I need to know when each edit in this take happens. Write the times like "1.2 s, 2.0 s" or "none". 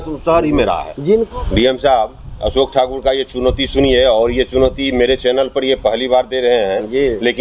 1.3 s